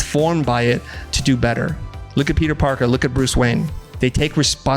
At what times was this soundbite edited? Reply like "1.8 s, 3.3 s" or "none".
none